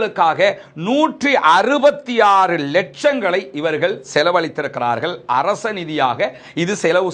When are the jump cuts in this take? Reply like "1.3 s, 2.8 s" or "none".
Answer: none